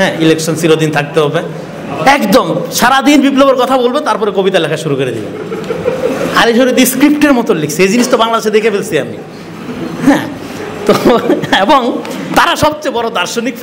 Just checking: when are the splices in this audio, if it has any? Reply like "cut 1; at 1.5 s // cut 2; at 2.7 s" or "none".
none